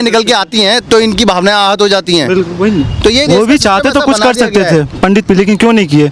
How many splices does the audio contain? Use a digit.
0